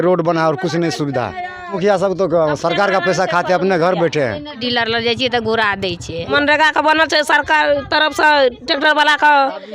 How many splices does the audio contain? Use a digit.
3